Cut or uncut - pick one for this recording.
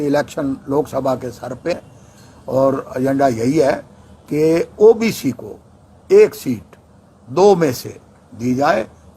cut